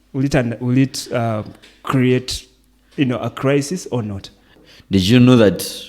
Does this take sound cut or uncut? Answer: cut